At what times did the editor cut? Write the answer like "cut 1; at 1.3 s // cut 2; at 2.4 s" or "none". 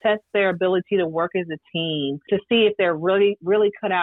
cut 1; at 2.3 s